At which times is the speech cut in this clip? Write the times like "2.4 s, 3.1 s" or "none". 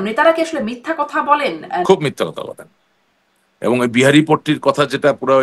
1.9 s